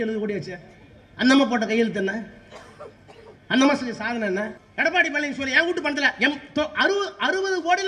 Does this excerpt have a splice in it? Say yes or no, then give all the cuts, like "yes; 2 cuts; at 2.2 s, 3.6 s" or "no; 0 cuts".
yes; 1 cut; at 4.6 s